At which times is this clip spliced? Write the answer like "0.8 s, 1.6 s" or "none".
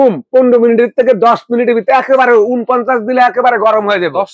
none

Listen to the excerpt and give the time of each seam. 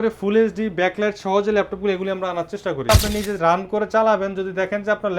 2.9 s

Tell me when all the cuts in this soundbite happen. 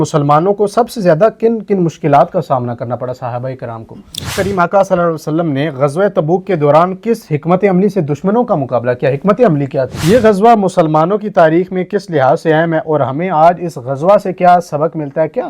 4.3 s, 9.9 s

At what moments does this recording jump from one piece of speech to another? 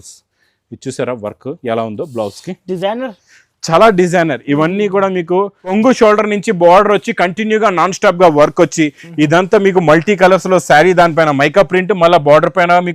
5.7 s

